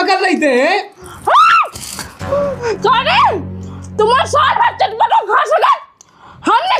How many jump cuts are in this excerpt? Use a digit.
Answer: 1